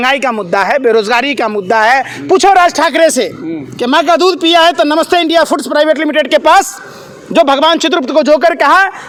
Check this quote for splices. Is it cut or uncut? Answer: uncut